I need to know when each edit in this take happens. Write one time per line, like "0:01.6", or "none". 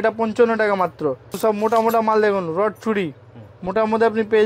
0:01.4